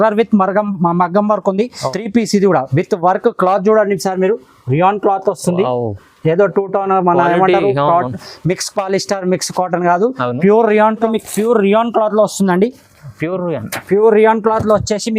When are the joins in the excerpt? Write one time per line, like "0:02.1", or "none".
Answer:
0:01.9
0:11.1

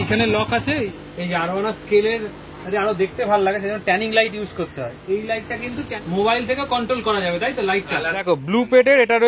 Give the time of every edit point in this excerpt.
0:00.9
0:05.9
0:08.1

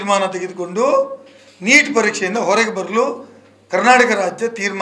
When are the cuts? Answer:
none

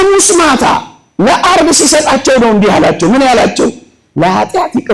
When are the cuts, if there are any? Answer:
none

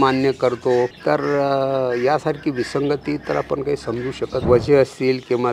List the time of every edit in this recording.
0:01.0
0:04.4

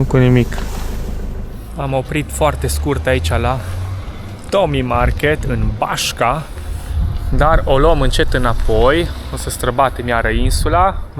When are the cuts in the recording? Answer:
none

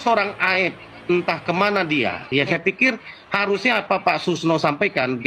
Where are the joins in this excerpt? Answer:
0:02.5

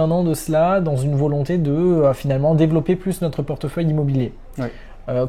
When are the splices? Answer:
none

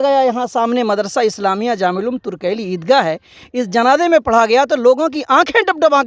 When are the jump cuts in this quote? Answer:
none

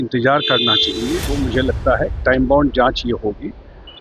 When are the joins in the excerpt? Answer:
0:01.3

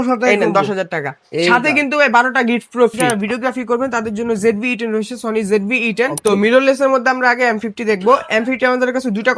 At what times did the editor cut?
0:03.1
0:06.2

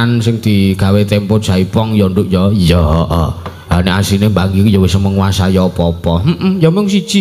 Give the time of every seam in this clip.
none

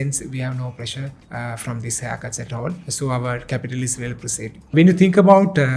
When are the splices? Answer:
0:01.2
0:02.9
0:04.7

